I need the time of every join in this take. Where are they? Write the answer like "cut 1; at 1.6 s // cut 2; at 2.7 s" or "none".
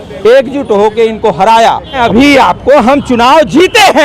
cut 1; at 2.0 s